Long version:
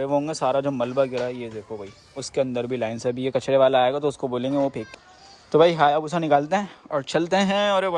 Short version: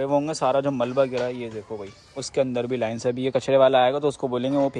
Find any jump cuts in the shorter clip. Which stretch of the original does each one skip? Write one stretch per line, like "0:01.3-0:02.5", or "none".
none